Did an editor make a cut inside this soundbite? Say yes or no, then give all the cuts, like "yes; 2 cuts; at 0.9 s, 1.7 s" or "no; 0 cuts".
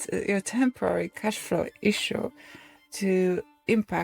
no; 0 cuts